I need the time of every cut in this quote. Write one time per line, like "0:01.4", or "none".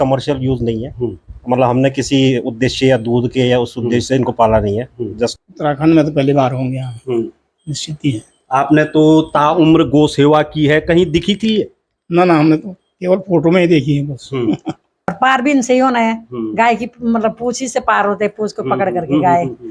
0:05.4
0:15.1